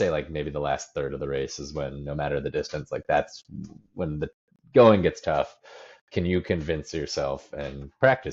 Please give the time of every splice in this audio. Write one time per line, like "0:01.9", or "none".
none